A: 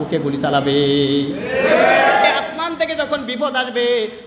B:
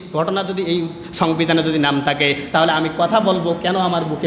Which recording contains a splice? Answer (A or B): A